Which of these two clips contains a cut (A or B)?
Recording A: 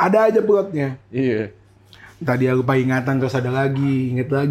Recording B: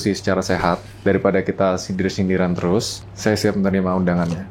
B